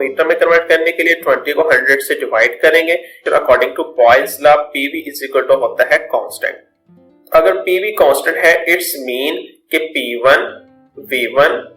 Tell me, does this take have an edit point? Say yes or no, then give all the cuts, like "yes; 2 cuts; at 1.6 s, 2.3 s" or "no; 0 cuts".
yes; 1 cut; at 3.2 s